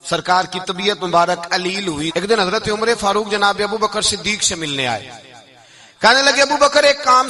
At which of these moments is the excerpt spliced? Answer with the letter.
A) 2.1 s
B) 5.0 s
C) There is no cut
A